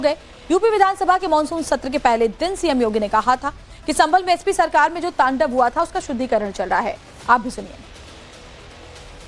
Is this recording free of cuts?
no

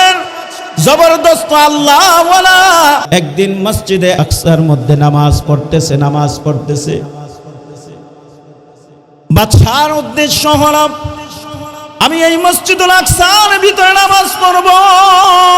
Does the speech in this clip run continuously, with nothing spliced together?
no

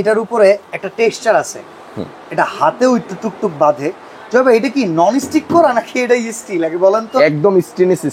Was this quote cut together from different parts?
no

